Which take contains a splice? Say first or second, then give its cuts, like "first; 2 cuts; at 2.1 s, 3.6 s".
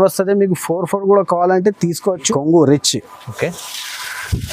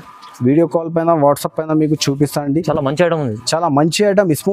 first; 1 cut; at 2.3 s